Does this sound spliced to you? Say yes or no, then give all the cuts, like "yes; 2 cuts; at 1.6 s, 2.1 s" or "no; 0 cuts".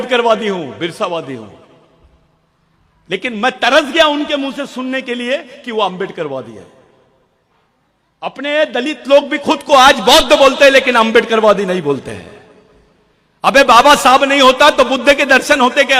no; 0 cuts